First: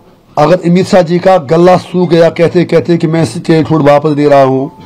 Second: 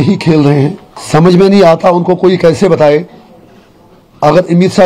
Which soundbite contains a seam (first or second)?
second